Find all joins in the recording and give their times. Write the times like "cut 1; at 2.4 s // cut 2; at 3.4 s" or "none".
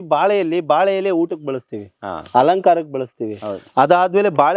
none